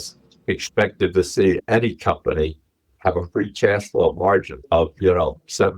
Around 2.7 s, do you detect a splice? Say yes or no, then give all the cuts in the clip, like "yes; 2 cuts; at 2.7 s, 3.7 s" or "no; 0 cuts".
no; 1 cut; at 4.6 s